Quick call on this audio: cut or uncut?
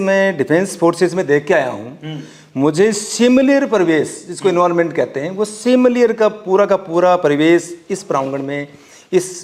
uncut